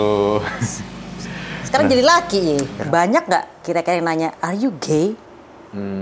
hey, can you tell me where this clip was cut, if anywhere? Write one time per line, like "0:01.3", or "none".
0:02.8